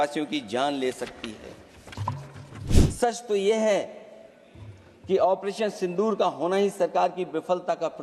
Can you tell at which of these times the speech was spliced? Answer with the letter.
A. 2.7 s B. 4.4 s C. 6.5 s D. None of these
A